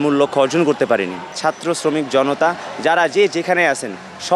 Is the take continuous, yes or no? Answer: no